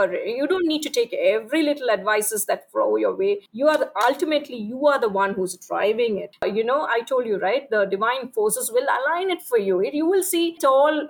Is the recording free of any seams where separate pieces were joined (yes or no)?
no